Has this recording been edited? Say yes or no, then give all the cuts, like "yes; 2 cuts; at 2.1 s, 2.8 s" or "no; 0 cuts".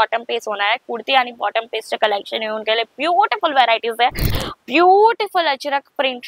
yes; 1 cut; at 4.4 s